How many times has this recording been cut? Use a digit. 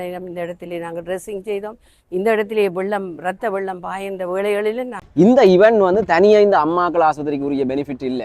1